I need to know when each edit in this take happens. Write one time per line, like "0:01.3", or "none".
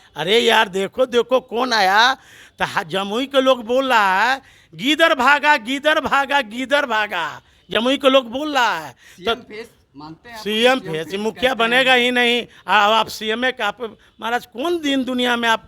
none